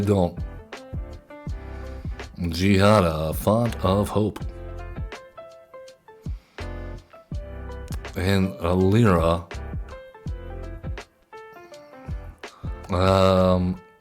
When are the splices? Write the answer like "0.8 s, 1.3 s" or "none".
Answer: 12.9 s